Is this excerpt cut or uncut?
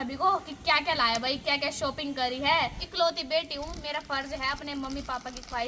cut